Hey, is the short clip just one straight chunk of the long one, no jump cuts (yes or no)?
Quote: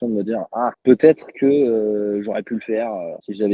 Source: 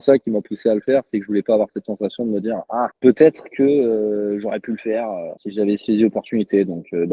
yes